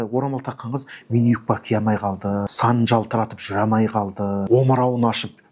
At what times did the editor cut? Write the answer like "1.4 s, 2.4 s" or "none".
2.5 s, 4.4 s